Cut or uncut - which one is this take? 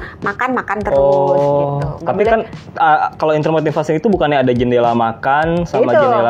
uncut